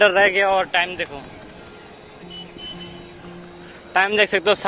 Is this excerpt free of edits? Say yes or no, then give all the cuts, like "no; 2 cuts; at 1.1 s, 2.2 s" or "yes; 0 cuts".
yes; 0 cuts